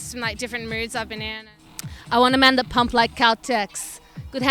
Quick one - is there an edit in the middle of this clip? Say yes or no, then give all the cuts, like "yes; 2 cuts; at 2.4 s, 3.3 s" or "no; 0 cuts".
yes; 1 cut; at 1.4 s